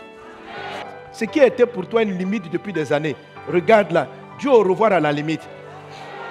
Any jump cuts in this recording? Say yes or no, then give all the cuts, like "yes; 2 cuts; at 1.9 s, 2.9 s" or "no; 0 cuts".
yes; 1 cut; at 0.9 s